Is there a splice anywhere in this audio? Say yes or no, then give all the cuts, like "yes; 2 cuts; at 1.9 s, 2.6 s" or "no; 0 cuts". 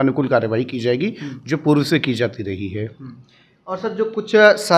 no; 0 cuts